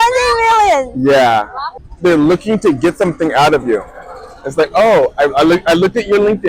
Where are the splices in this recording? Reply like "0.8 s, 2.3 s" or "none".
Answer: 1.6 s